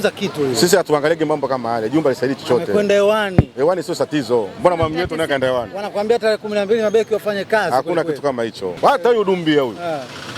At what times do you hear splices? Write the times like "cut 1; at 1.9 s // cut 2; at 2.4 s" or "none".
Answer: cut 1; at 8.7 s